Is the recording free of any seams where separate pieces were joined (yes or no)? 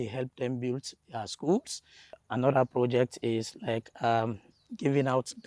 no